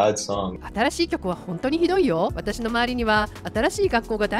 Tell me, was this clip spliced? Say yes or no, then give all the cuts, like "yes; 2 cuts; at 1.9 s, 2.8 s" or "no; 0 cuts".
yes; 1 cut; at 2.3 s